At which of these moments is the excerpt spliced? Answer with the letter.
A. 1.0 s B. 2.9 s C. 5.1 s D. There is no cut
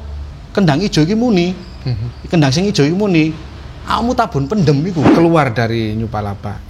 C